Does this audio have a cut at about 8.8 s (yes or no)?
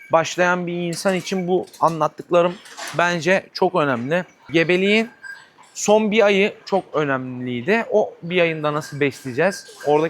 no